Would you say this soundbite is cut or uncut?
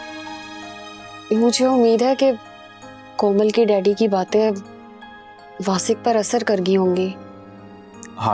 uncut